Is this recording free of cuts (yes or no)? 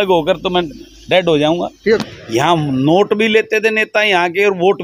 no